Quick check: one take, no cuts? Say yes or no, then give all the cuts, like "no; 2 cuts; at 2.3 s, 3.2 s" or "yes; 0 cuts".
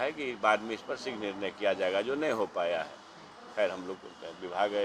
yes; 0 cuts